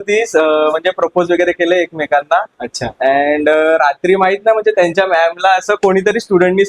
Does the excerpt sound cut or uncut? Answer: uncut